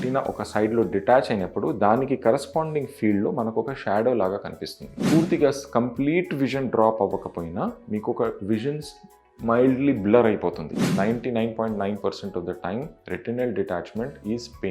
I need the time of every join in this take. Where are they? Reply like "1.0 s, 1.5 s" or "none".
4.9 s, 10.8 s